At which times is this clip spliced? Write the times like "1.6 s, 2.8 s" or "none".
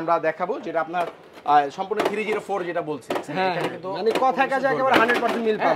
none